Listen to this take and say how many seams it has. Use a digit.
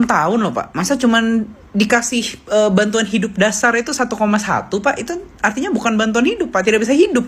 0